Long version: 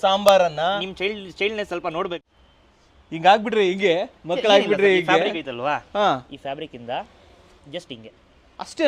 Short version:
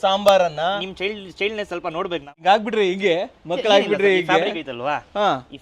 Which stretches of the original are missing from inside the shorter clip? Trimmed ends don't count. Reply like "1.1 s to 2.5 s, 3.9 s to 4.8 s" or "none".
2.3 s to 3.1 s